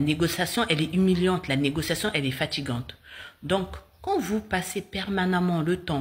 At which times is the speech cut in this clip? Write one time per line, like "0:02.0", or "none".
0:03.1